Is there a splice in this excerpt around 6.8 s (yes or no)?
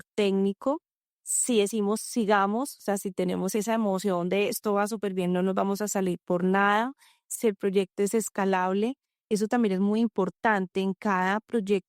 no